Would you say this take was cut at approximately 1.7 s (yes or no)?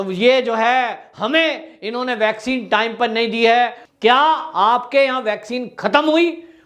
no